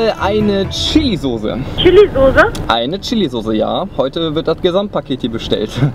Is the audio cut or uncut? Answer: cut